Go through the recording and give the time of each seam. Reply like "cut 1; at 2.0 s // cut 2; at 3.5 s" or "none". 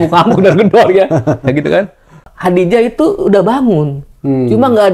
cut 1; at 2.3 s